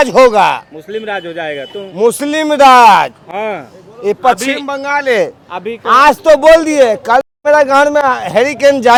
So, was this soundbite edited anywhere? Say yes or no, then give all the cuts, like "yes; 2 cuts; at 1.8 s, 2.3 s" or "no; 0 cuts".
no; 0 cuts